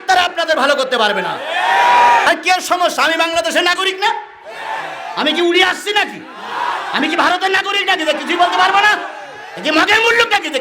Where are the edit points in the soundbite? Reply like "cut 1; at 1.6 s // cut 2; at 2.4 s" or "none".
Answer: cut 1; at 2.3 s